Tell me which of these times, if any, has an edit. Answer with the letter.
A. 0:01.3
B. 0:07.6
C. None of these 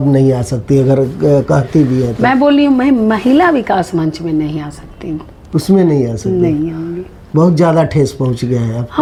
C